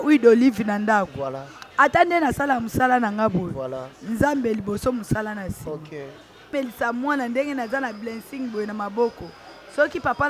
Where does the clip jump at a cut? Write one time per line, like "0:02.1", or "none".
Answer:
0:06.5